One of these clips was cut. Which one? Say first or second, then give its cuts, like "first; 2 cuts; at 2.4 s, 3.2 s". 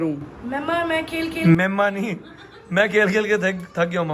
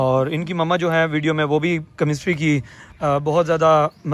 first; 1 cut; at 2.4 s